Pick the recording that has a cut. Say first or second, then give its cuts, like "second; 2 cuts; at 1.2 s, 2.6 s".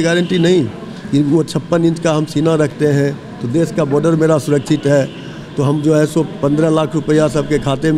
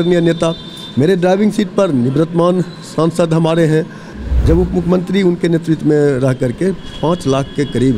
second; 1 cut; at 4.2 s